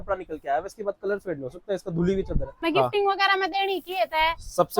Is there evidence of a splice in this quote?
yes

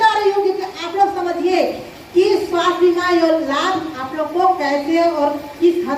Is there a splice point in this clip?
no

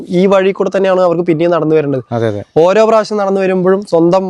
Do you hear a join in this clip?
no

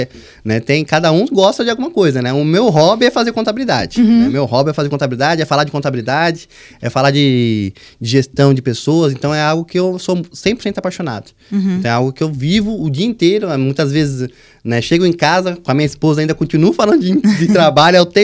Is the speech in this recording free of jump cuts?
yes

